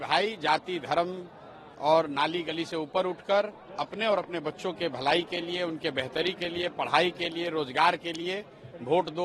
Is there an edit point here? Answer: no; 0 cuts

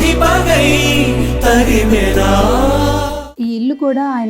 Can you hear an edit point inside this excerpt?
yes; 1 cut; at 3.3 s

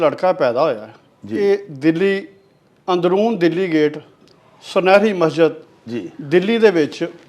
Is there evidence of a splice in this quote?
no; 0 cuts

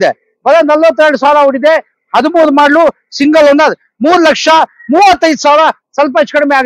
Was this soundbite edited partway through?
no; 0 cuts

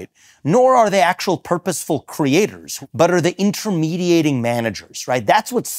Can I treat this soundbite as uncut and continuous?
no; 1 cut; at 2.7 s

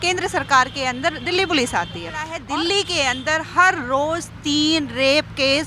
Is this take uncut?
no; 1 cut; at 2.3 s

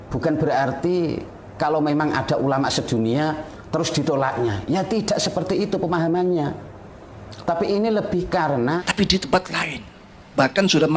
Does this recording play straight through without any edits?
no; 1 cut; at 8.8 s

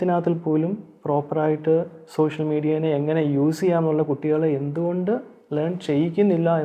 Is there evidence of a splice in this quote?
no; 0 cuts

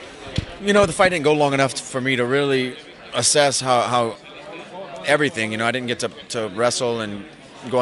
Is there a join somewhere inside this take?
no; 0 cuts

